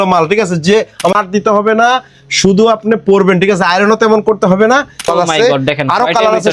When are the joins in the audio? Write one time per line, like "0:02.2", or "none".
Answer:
0:01.2
0:05.1